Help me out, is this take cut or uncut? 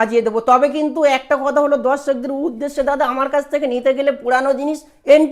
uncut